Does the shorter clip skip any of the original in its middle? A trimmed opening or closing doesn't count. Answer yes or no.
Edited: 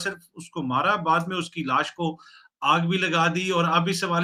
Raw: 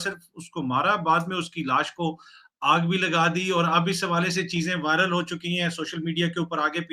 no